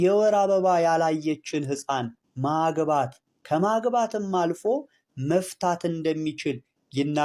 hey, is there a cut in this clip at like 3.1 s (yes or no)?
no